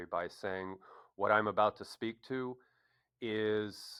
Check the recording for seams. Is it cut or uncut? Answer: uncut